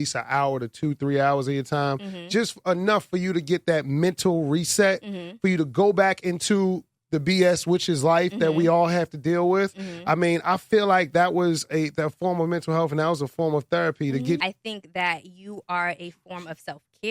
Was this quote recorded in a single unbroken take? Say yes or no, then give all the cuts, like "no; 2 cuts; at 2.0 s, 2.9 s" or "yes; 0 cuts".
no; 1 cut; at 14.4 s